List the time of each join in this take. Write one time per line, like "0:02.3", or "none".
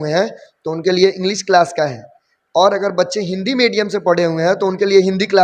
none